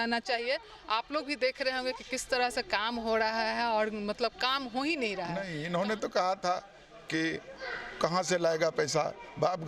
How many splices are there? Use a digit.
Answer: 1